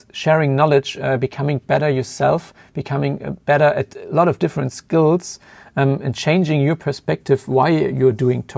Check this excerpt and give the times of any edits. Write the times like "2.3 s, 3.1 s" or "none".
none